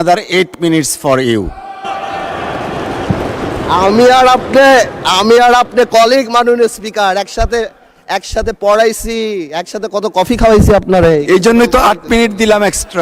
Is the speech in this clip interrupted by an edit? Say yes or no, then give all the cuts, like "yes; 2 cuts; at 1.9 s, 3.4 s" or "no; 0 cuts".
no; 0 cuts